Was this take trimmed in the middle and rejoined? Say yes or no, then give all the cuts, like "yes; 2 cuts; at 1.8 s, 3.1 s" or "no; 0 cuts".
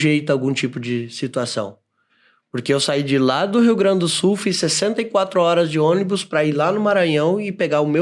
no; 0 cuts